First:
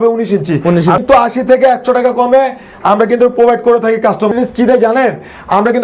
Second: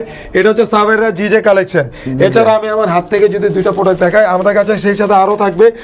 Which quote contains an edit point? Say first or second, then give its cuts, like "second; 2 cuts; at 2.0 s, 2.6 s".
first; 2 cuts; at 1.0 s, 4.3 s